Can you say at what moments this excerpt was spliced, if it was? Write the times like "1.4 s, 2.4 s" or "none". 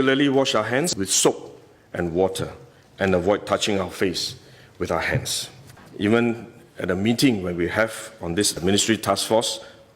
0.9 s, 5.8 s